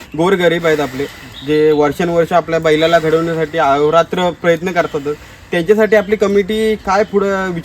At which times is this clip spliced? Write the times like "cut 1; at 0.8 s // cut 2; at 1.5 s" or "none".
none